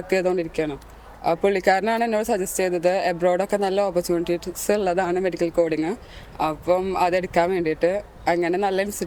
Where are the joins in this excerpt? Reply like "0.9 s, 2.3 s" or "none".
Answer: none